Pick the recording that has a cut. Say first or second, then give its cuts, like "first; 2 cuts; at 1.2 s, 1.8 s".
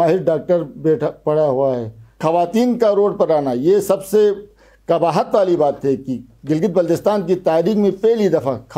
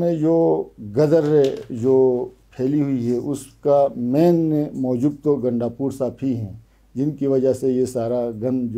first; 1 cut; at 2.2 s